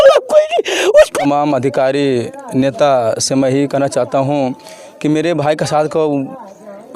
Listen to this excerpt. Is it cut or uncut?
cut